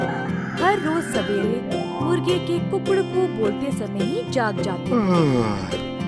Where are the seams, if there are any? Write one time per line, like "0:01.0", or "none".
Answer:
none